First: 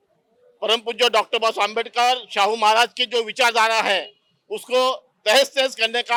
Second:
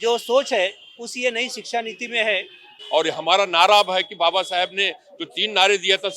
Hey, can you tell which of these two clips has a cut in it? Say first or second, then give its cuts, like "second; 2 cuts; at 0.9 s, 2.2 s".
second; 1 cut; at 2.8 s